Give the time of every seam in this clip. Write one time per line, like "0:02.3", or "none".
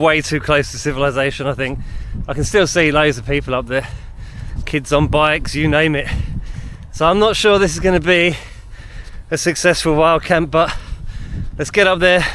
none